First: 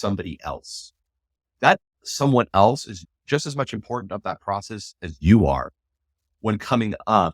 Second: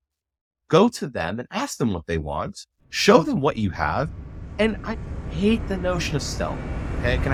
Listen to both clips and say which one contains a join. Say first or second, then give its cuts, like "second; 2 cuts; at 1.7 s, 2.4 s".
first; 1 cut; at 3.1 s